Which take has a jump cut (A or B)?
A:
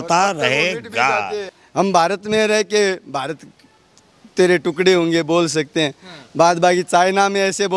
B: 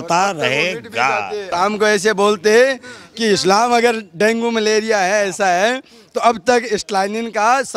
A